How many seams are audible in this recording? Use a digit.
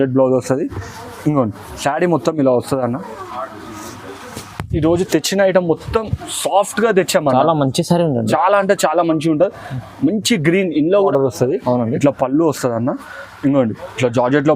1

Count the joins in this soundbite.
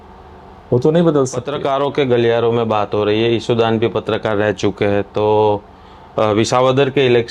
1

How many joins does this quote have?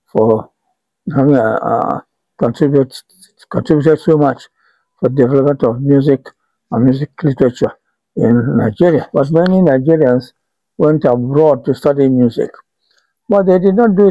1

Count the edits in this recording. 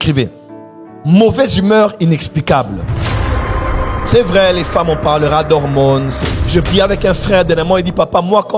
1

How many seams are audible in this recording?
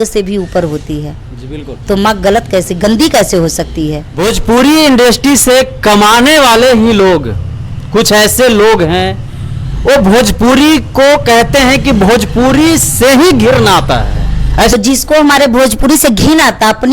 2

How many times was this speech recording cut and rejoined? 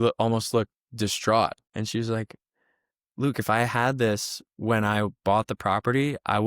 1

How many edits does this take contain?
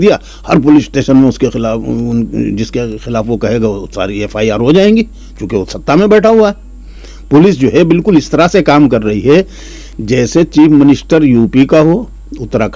0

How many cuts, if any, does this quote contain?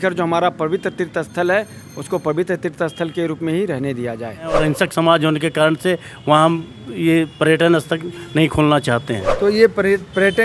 2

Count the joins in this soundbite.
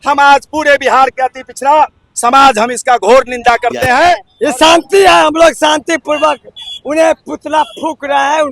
1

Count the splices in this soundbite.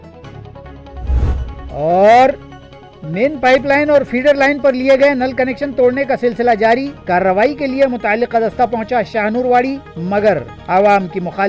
1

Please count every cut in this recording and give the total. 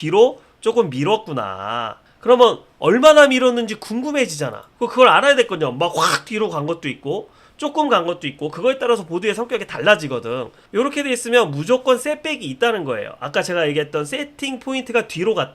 2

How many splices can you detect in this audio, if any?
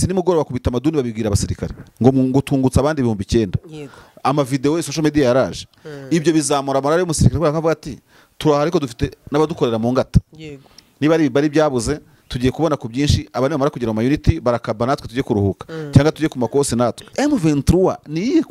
1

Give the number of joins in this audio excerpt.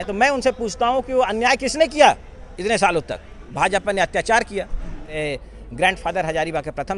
2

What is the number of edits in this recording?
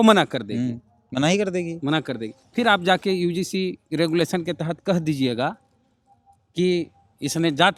0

